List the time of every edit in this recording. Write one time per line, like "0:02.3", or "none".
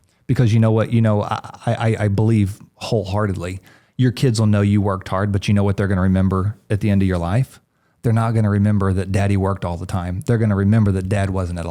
none